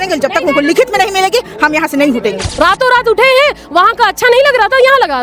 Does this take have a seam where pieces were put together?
yes; 1 cut; at 2.4 s

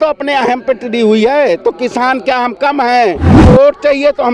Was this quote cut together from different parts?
yes; 1 cut; at 3.4 s

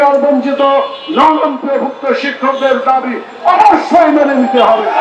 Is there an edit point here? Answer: no; 0 cuts

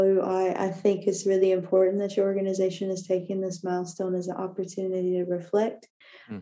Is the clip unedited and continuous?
yes; 0 cuts

